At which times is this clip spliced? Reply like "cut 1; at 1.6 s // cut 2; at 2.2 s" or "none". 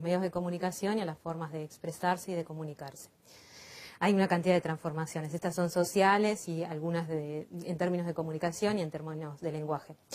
cut 1; at 7.2 s